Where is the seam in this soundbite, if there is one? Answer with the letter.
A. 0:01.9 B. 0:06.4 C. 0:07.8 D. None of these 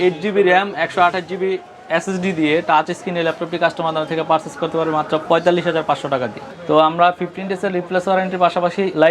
B